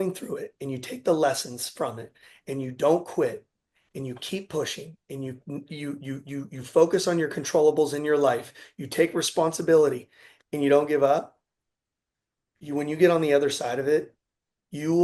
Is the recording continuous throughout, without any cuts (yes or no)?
yes